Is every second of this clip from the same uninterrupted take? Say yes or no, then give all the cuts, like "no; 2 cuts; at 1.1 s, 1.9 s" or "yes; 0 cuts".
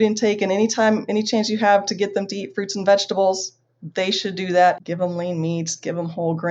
no; 1 cut; at 4.8 s